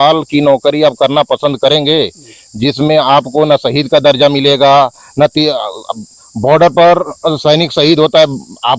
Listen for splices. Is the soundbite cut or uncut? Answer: uncut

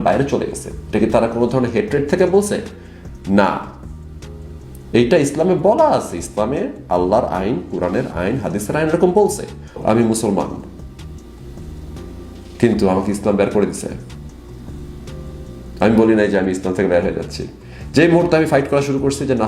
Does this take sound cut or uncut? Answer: cut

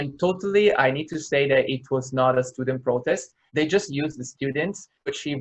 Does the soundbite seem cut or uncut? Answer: cut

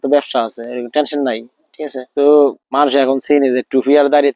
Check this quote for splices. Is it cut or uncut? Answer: cut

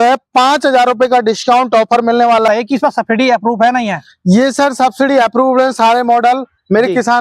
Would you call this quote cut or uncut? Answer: cut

